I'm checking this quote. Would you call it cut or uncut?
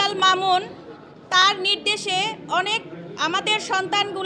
uncut